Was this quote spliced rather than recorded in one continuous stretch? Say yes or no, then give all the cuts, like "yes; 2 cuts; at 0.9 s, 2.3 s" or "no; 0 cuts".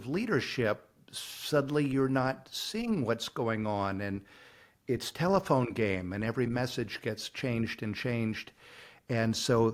no; 0 cuts